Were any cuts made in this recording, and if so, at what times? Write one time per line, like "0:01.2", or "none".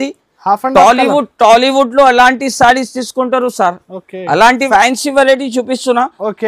0:04.6

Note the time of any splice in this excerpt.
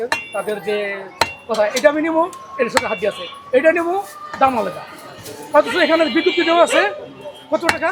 none

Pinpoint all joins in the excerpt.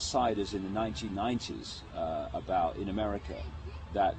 0:01.7

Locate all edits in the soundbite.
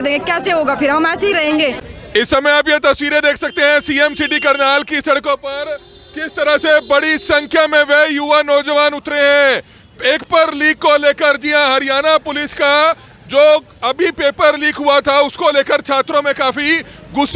0:01.9

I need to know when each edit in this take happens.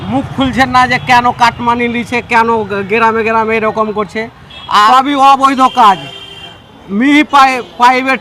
0:04.9

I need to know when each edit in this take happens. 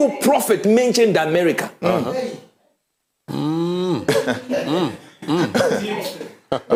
none

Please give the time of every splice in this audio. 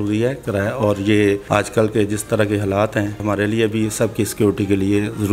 0:01.4
0:03.2

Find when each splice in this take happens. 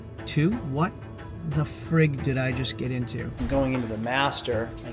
0:03.3

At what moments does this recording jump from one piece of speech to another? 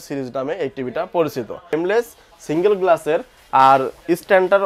0:01.7

